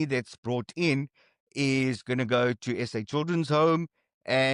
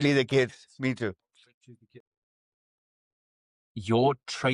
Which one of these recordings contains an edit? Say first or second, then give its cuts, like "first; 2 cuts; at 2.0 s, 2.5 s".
second; 1 cut; at 2.2 s